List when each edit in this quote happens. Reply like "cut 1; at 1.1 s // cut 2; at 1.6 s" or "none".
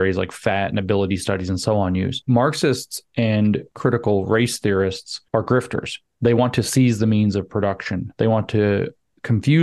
cut 1; at 2.2 s // cut 2; at 3.7 s // cut 3; at 5.1 s